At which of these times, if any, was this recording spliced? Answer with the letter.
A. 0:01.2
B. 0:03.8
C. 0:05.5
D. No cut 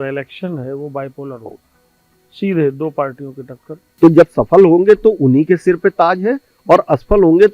B